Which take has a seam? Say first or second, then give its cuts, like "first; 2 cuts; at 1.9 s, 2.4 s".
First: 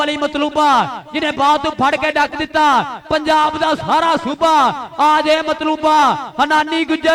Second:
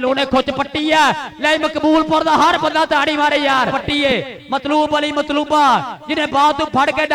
second; 1 cut; at 3.8 s